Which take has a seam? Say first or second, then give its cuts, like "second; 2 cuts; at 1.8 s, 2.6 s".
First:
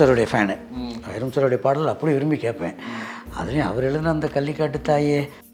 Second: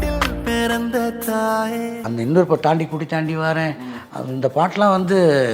second; 1 cut; at 1.9 s